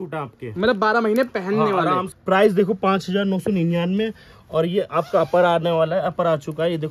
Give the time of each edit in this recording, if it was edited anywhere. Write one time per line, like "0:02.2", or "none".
0:02.1